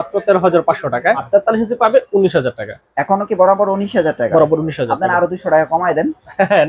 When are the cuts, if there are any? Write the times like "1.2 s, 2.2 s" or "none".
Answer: 1.3 s

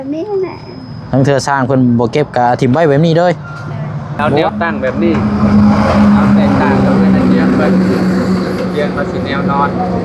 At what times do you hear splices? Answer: 4.3 s

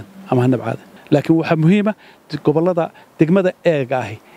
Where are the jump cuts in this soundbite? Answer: 0.9 s

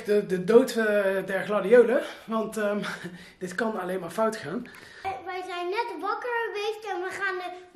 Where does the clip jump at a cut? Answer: 4.8 s

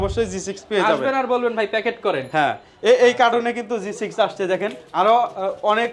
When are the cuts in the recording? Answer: none

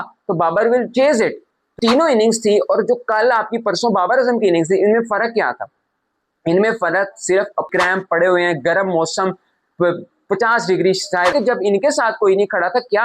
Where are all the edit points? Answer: 1.7 s, 7.7 s, 11.3 s

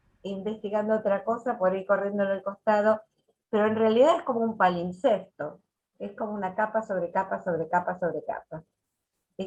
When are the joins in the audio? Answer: none

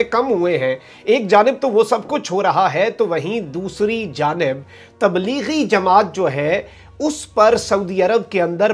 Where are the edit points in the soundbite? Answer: none

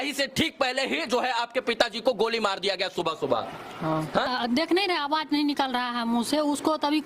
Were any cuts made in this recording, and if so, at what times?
4.3 s

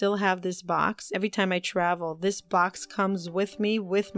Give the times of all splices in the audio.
1.1 s

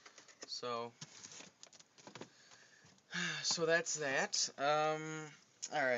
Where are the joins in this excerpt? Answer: 3.6 s

